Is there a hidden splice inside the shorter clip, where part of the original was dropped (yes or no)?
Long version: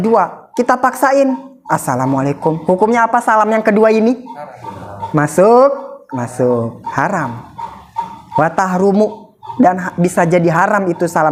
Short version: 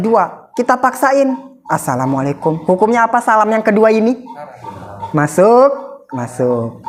no